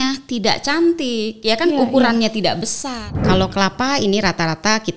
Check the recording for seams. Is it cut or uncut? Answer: cut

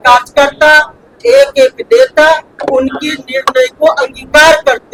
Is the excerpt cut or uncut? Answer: uncut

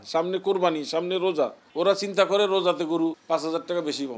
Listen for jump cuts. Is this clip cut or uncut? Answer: cut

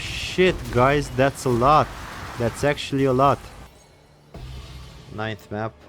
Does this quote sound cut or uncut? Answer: cut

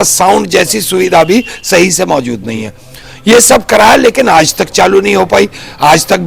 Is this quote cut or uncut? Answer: uncut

